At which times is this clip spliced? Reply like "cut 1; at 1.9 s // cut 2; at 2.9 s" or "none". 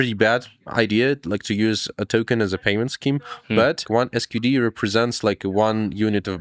cut 1; at 3.9 s